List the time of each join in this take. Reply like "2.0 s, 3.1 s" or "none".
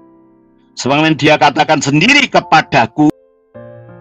3.1 s